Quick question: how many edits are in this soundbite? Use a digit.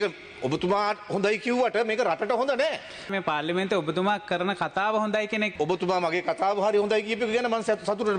2